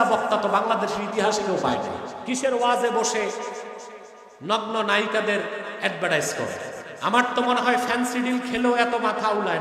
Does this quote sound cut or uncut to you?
cut